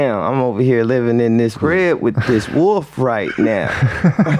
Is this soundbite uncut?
no; 1 cut; at 1.5 s

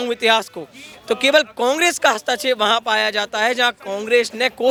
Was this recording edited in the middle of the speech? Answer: no; 0 cuts

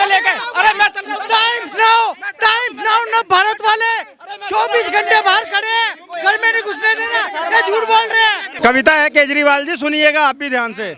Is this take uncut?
no; 1 cut; at 8.5 s

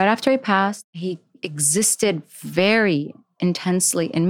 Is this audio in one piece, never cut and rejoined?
no; 1 cut; at 1.0 s

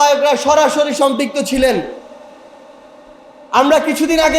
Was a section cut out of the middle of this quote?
no; 0 cuts

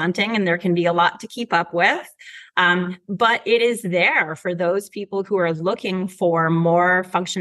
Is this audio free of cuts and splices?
yes; 0 cuts

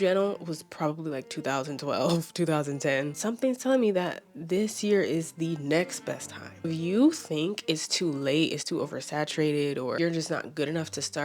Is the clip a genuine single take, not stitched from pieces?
no; 3 cuts; at 3.2 s, 6.7 s, 10.0 s

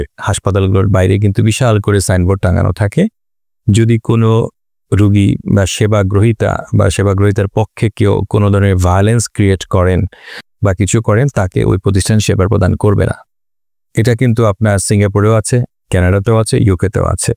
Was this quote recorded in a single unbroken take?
yes; 0 cuts

